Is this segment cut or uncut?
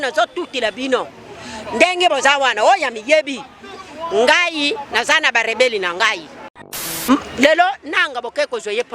cut